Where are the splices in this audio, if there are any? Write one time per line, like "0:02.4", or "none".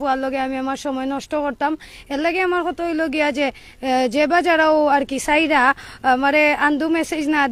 none

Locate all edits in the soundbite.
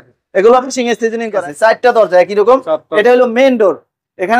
0:01.4

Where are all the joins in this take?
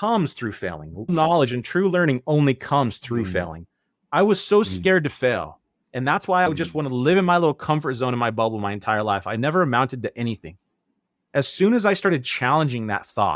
0:01.1

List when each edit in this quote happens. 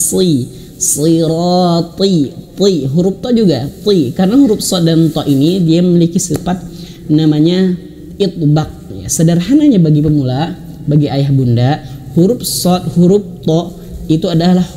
none

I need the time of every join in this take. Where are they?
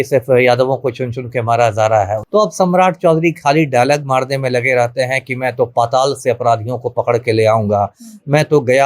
0:02.2

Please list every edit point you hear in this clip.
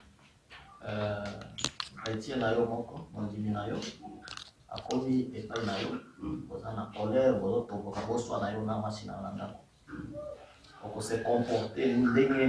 none

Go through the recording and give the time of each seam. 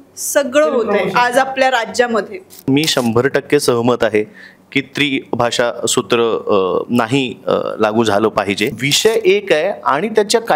0:02.6
0:08.8

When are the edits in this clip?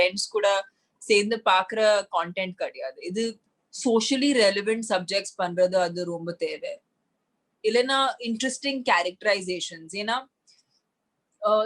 0:03.4

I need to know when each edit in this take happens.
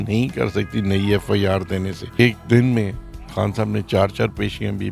0:02.2

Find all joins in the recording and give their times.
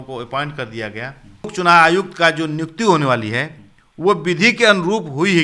0:01.5

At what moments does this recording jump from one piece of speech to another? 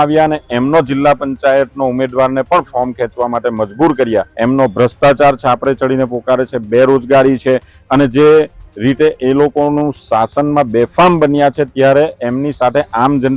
0:04.3

